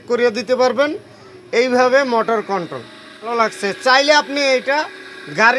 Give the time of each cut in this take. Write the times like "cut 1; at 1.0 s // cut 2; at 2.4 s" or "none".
cut 1; at 3.3 s